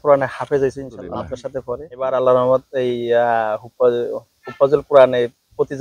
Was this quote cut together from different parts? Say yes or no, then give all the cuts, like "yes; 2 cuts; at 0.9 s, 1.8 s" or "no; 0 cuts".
no; 0 cuts